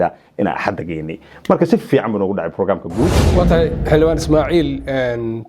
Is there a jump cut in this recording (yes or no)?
yes